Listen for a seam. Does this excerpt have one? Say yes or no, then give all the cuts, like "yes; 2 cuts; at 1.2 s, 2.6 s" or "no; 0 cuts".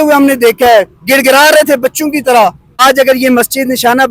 yes; 1 cut; at 2.8 s